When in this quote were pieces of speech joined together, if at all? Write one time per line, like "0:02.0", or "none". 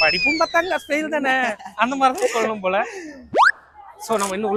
none